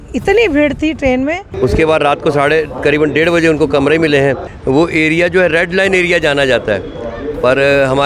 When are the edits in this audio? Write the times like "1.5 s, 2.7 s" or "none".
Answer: 1.5 s, 4.5 s